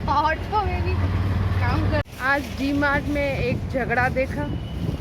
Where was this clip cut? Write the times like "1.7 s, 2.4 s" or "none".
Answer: 2.0 s